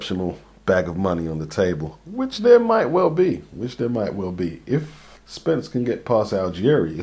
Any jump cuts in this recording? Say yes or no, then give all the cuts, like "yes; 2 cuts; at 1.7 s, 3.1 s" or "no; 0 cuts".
no; 0 cuts